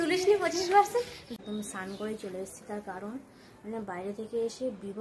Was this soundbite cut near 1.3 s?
yes; 1 cut; at 1.3 s

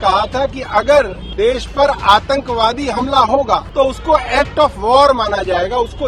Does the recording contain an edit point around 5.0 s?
no; 2 cuts; at 1.2 s, 3.7 s

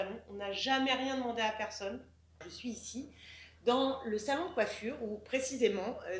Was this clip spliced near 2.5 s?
yes; 1 cut; at 2.5 s

